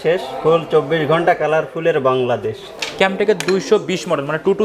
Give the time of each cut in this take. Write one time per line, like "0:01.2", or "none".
0:02.7